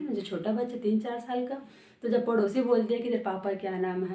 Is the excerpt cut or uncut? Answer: uncut